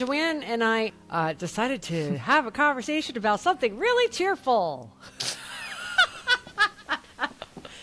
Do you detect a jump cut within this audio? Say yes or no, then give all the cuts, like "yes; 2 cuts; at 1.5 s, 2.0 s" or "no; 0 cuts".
yes; 1 cut; at 0.9 s